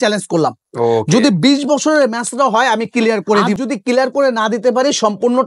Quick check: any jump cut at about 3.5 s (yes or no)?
yes